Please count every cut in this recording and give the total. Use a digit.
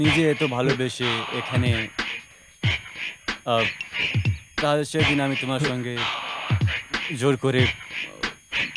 0